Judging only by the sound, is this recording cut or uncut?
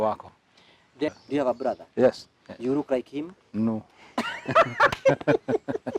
cut